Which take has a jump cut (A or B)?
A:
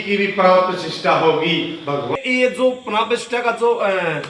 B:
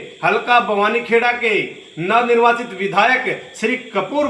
A